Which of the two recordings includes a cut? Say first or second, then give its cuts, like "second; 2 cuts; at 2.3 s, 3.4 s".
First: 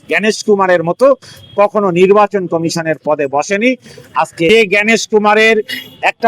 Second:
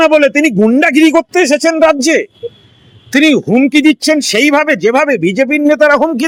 first; 1 cut; at 4.5 s